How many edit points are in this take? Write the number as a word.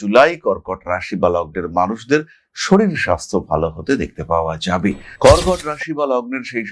one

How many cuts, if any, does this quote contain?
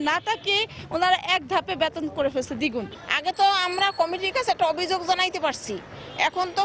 one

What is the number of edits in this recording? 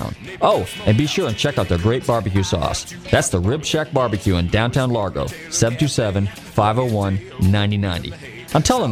zero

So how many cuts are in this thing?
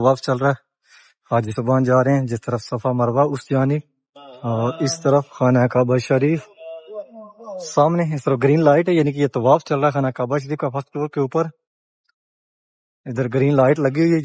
zero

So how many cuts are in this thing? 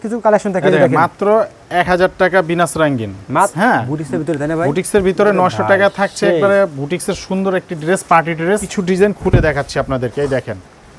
two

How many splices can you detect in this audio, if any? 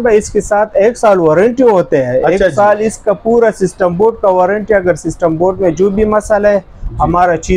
zero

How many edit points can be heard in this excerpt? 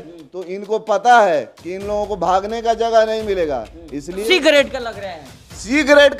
one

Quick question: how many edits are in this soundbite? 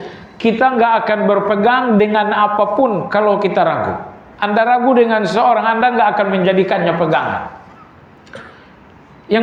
zero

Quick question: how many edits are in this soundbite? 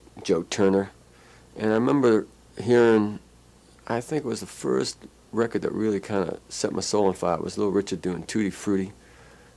zero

